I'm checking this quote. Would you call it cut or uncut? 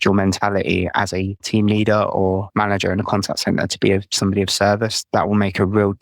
cut